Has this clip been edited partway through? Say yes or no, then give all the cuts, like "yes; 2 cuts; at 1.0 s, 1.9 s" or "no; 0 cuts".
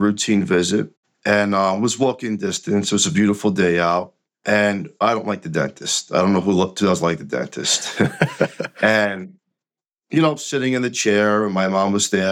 no; 0 cuts